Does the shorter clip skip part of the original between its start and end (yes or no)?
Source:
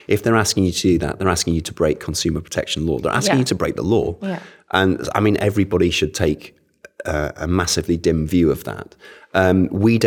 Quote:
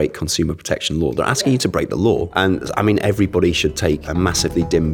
yes